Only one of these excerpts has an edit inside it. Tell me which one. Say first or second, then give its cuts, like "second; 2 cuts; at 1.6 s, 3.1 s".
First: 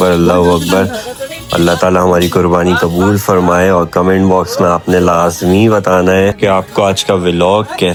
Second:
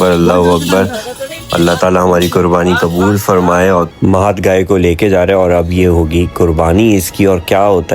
second; 1 cut; at 3.9 s